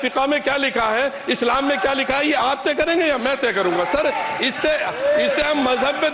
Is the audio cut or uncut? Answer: uncut